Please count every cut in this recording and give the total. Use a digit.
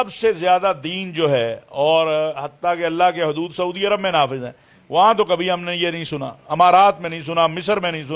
0